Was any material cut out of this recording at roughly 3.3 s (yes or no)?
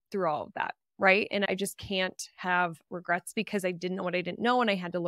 yes